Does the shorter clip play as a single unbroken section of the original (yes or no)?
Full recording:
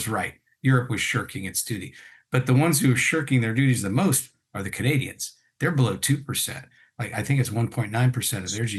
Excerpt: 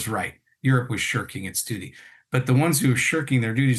yes